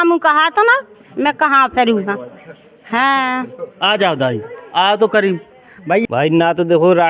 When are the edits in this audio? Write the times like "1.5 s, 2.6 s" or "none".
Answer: 6.0 s